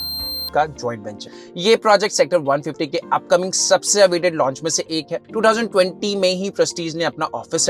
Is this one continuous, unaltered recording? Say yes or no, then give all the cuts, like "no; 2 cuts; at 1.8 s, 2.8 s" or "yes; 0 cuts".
yes; 0 cuts